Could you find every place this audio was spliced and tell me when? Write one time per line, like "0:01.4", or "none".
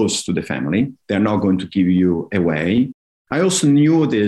none

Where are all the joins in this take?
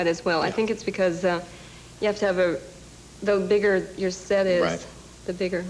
none

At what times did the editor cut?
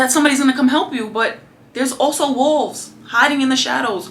none

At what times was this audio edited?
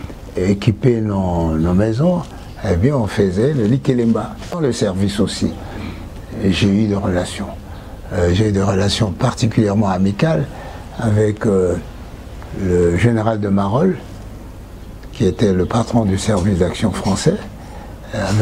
0:04.6

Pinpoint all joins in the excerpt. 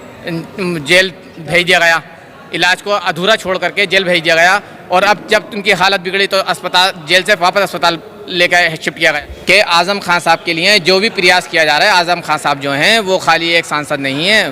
0:09.2

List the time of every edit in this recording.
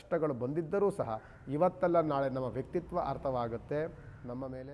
none

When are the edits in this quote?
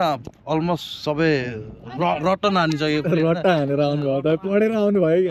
none

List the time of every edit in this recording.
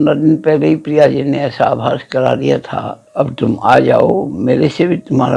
0:03.0

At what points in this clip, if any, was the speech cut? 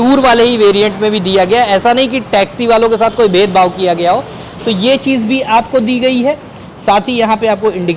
none

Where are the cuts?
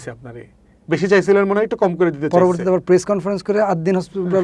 none

